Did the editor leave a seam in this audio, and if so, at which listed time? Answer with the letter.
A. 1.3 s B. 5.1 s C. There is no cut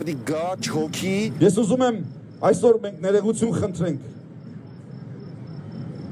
A